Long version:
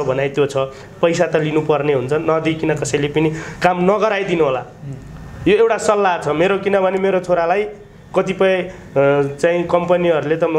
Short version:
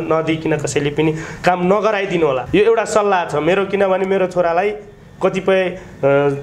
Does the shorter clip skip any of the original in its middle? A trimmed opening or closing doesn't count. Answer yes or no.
yes